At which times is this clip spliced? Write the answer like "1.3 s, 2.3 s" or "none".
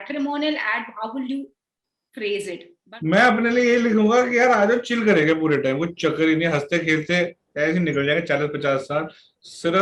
2.7 s